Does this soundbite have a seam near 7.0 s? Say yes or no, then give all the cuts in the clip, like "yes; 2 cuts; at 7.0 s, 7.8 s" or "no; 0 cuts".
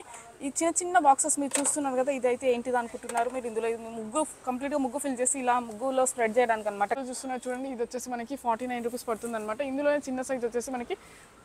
yes; 1 cut; at 7.0 s